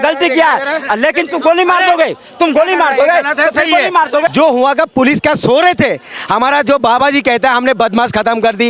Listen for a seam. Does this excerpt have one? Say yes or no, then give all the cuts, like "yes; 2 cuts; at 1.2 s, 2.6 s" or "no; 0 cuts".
yes; 1 cut; at 4.3 s